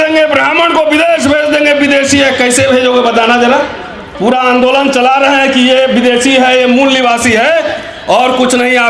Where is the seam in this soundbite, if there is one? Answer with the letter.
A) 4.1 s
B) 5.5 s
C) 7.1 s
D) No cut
A